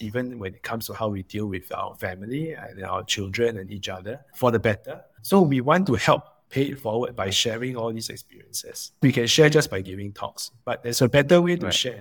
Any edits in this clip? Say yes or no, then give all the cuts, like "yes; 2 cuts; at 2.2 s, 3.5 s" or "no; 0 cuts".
yes; 2 cuts; at 5.1 s, 9.0 s